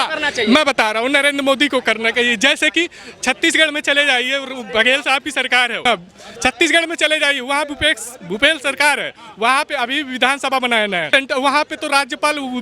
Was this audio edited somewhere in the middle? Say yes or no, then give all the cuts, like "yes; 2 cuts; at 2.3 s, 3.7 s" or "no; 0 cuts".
yes; 2 cuts; at 5.8 s, 11.1 s